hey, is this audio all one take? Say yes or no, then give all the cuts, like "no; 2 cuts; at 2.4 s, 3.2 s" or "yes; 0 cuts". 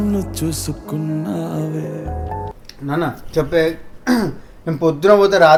yes; 0 cuts